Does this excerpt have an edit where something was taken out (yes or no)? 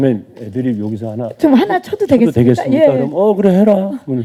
no